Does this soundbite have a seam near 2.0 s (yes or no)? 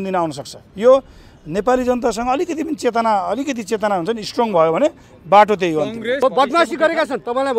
no